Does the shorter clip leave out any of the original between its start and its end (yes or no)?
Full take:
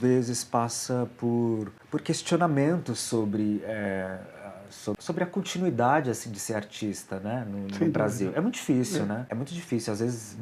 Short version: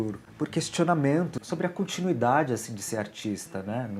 yes